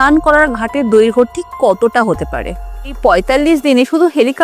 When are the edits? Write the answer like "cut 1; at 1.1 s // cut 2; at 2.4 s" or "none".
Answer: cut 1; at 3.0 s